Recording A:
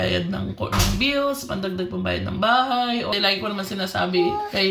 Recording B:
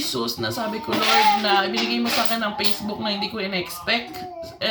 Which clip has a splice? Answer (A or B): A